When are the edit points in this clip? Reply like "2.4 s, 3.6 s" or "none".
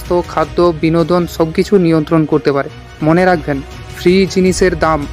2.8 s